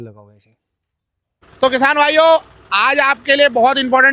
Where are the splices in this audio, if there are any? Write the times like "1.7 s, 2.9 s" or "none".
1.6 s